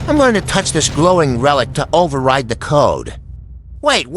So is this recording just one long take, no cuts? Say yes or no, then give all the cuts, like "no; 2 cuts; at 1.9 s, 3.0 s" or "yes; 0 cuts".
yes; 0 cuts